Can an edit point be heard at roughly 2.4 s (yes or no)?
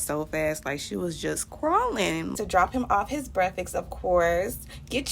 yes